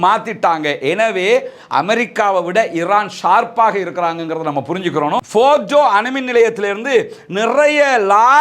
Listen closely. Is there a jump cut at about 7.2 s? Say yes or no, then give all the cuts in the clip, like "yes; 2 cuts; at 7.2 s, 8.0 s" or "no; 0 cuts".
no; 1 cut; at 5.3 s